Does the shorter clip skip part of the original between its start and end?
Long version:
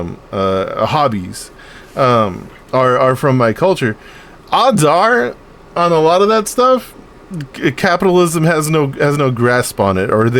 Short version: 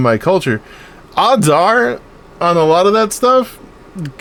no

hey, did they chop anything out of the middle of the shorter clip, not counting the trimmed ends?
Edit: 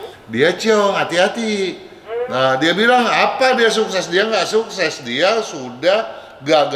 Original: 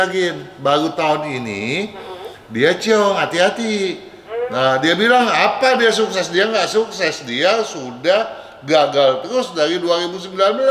no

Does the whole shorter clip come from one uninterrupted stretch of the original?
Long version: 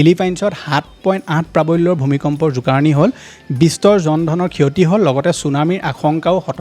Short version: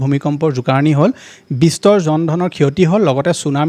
yes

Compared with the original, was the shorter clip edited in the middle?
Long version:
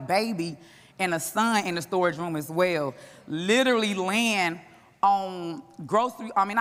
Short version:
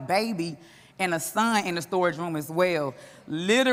no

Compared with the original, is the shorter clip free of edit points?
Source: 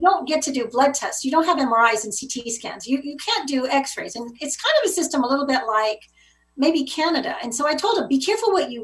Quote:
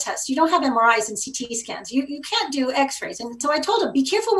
no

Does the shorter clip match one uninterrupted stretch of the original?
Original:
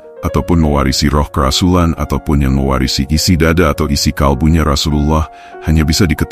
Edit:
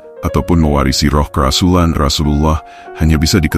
no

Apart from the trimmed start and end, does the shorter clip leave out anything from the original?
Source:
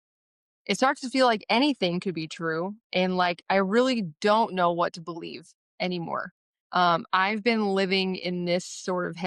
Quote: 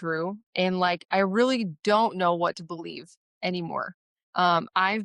no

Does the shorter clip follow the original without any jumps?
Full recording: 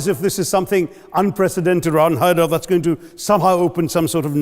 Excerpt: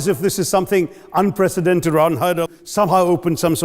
no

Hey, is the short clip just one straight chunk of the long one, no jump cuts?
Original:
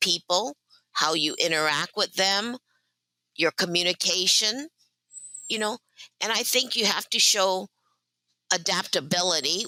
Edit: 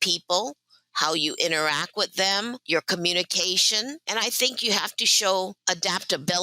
no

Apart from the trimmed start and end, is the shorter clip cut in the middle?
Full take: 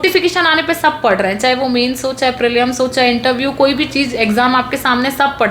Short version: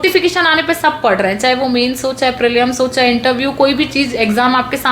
no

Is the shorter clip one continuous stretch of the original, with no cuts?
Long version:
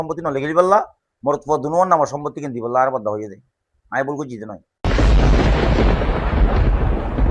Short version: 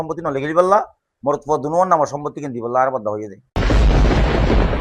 no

